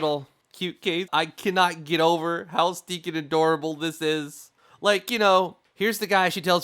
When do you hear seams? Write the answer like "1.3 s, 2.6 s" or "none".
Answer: 1.1 s, 5.6 s